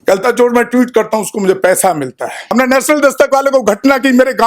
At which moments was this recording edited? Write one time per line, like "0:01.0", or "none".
0:02.5